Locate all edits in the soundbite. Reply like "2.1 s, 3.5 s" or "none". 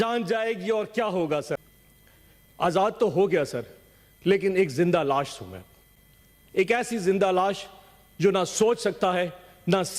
1.6 s